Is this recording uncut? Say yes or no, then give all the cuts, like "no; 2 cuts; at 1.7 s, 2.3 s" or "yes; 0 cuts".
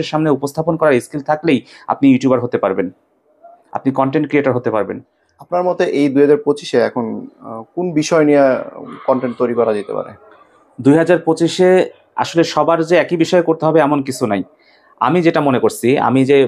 yes; 0 cuts